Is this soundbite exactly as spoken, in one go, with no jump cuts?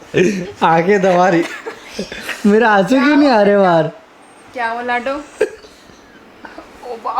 yes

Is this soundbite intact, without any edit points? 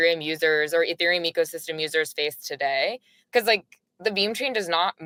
yes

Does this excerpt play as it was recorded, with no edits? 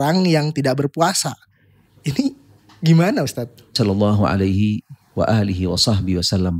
no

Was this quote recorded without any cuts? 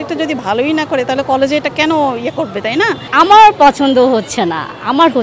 no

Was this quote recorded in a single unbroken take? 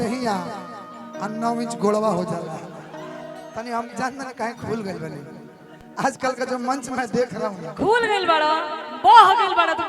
no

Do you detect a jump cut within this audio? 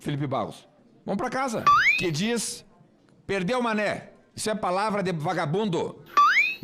yes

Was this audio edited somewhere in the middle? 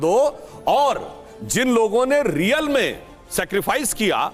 no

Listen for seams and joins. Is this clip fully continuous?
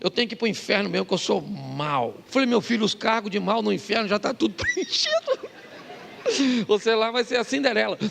no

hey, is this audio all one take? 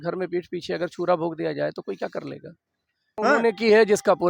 no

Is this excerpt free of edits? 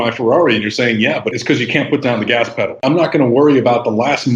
no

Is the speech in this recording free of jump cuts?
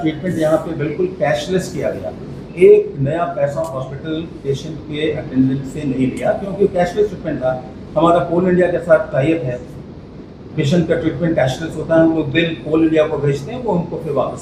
yes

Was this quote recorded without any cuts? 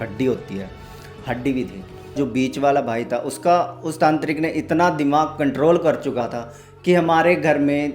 no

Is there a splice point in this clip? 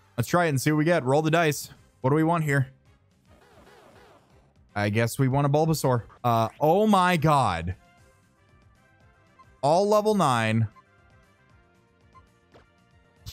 yes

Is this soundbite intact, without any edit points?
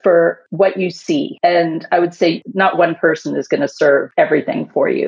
no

